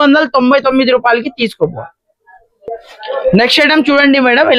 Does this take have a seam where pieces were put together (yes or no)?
no